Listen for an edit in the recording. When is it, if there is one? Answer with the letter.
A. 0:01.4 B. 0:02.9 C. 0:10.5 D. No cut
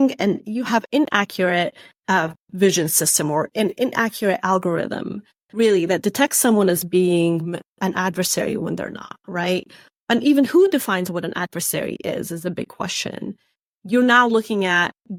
D